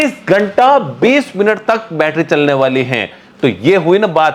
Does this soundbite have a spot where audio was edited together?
no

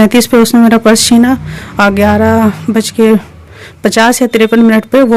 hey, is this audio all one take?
yes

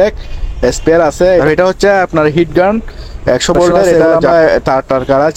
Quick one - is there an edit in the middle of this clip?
yes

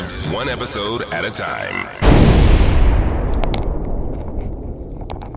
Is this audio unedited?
no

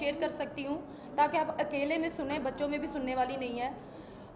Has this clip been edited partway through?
no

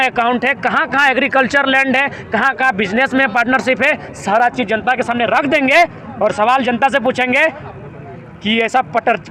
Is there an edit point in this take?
no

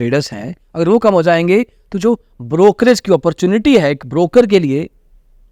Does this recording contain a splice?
no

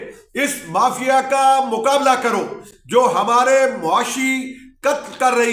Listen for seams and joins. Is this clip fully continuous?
yes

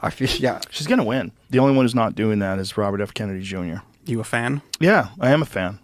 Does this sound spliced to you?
yes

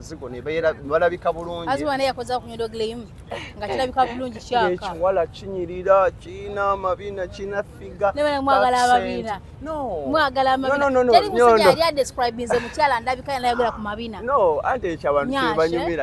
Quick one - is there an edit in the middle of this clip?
no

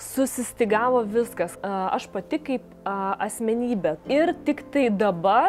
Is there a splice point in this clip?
yes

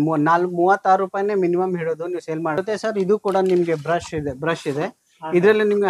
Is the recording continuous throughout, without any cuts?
no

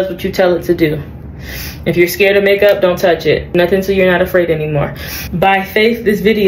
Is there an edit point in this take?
no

